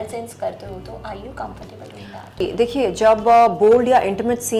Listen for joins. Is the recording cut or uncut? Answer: cut